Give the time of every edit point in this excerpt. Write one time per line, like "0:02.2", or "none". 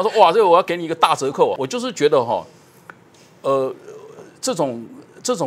0:01.6